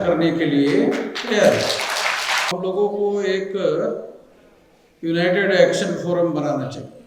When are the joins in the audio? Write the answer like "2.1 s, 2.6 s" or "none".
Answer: 2.5 s